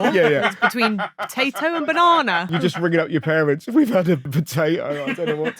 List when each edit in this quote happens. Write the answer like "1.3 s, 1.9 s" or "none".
4.3 s